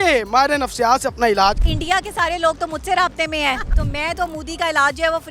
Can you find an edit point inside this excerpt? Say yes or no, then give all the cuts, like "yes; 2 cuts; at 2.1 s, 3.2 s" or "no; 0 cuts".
yes; 2 cuts; at 1.7 s, 3.7 s